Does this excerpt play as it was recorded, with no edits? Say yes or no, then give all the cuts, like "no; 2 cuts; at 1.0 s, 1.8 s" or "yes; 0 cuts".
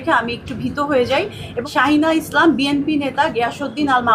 no; 1 cut; at 1.4 s